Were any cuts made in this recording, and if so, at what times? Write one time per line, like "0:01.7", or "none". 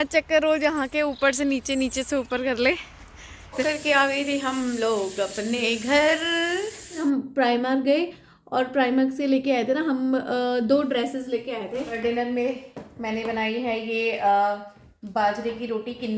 0:03.6
0:06.9
0:12.0